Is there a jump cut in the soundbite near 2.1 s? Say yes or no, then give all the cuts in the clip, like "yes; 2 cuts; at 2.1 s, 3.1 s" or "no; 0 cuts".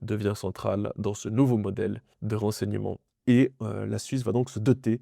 yes; 2 cuts; at 2.1 s, 3.1 s